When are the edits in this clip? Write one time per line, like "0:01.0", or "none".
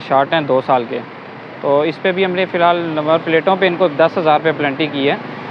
none